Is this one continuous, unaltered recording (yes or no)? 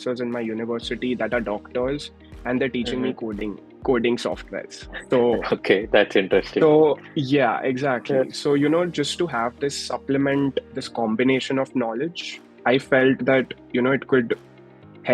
yes